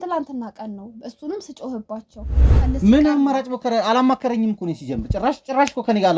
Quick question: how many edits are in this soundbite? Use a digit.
1